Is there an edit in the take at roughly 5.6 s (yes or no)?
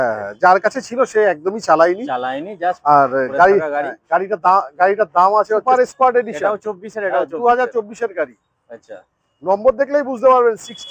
yes